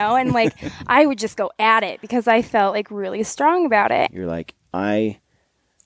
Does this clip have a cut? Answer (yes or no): yes